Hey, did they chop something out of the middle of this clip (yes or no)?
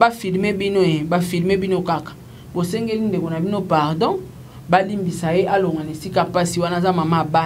no